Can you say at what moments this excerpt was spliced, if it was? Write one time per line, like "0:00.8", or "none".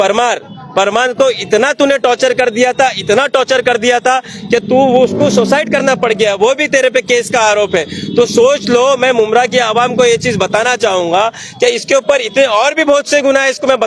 none